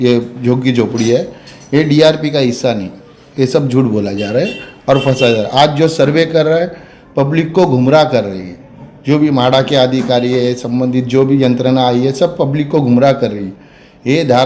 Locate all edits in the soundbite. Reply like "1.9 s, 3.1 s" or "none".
none